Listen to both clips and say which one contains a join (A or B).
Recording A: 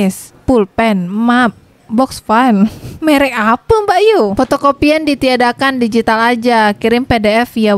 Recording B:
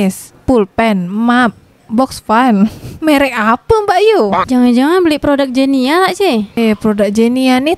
A